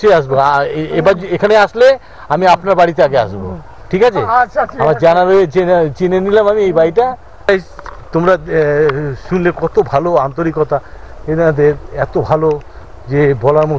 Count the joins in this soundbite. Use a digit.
1